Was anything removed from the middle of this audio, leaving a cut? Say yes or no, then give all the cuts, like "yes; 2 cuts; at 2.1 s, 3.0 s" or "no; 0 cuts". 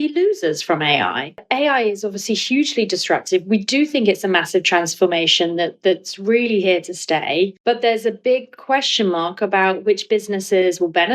yes; 1 cut; at 1.4 s